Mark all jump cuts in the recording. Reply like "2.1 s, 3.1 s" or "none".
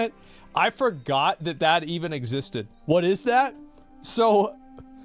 2.7 s